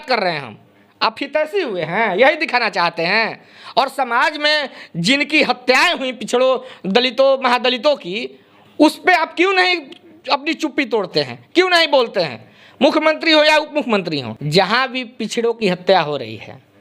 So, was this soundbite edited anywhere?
yes; 1 cut; at 14.3 s

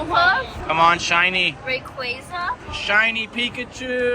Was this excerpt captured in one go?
no; 1 cut; at 2.6 s

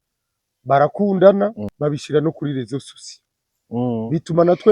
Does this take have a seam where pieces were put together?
yes; 1 cut; at 1.7 s

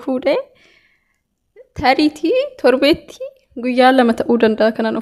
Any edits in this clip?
no; 0 cuts

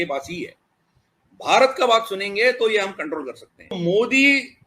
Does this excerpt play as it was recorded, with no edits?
no; 1 cut; at 3.8 s

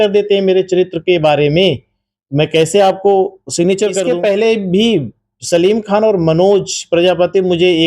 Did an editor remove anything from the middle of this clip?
yes; 1 cut; at 4.1 s

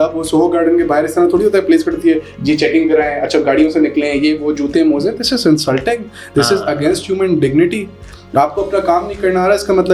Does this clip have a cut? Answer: no; 0 cuts

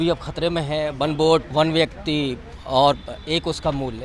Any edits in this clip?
yes; 1 cut; at 1.5 s

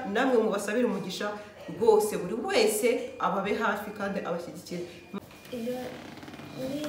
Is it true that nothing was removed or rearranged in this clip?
no; 1 cut; at 5.1 s

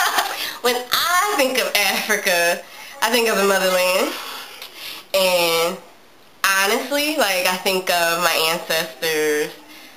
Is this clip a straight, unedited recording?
yes; 0 cuts

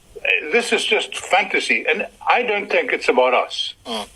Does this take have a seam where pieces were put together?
no; 0 cuts

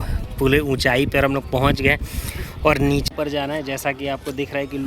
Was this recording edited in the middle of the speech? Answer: yes; 1 cut; at 3.1 s

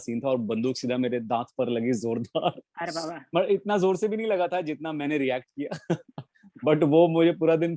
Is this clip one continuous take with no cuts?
yes; 0 cuts

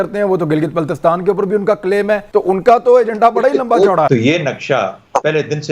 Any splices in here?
yes; 2 cuts; at 2.2 s, 4.1 s

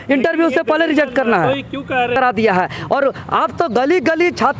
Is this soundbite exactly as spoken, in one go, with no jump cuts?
no; 1 cut; at 2.2 s

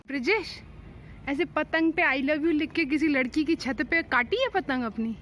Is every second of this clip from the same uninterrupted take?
yes; 0 cuts

